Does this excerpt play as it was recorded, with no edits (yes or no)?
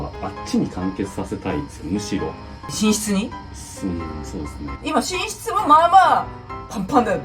no